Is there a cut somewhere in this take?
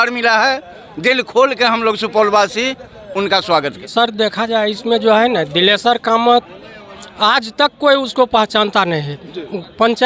yes; 1 cut; at 3.8 s

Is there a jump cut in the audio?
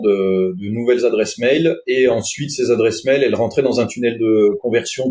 no; 0 cuts

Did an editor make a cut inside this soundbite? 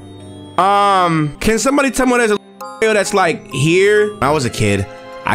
yes; 2 cuts; at 1.3 s, 4.2 s

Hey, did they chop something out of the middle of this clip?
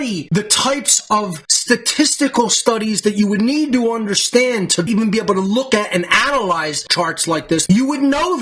yes; 2 cuts; at 4.9 s, 7.6 s

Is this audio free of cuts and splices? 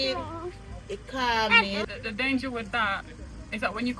no; 1 cut; at 1.8 s

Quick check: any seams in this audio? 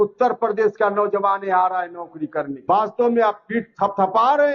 yes; 1 cut; at 2.5 s

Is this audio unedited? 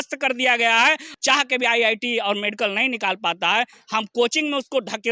no; 1 cut; at 1.1 s

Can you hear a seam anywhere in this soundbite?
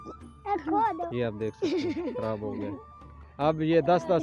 no; 0 cuts

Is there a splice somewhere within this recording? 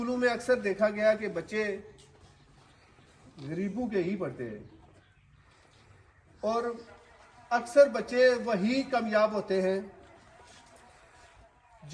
no; 0 cuts

